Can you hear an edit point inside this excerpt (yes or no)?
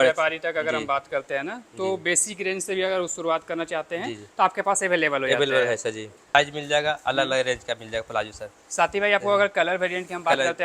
yes